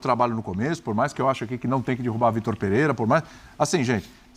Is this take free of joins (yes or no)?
yes